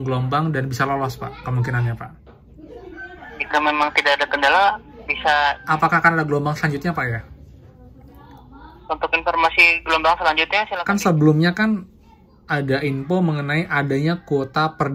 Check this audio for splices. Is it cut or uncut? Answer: cut